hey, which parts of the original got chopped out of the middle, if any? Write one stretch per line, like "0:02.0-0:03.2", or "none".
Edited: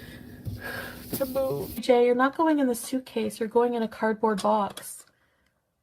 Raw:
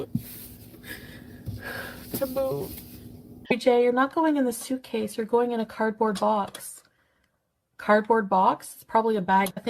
0:02.8-0:03.6